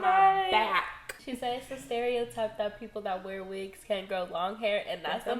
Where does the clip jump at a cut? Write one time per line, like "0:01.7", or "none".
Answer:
0:01.1